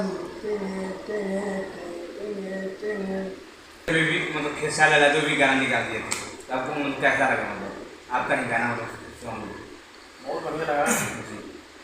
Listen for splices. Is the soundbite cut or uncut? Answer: cut